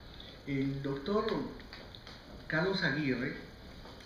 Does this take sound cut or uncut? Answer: uncut